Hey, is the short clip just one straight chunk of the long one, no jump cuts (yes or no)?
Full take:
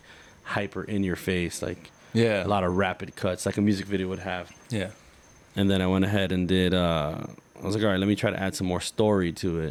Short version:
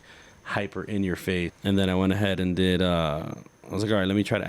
no